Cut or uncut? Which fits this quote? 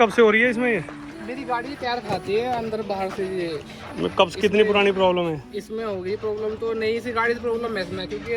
uncut